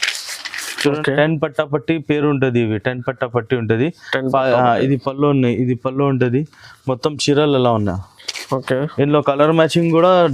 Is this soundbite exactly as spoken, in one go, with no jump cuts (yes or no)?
no